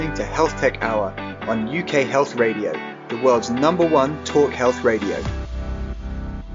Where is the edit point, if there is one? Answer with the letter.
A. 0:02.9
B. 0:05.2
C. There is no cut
B